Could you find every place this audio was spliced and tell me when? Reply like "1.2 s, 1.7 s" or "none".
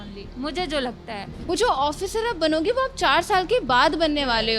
1.5 s

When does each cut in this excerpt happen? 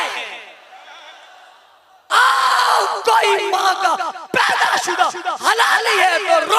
2.0 s

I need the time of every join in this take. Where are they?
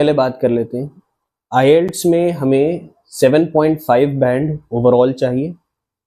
none

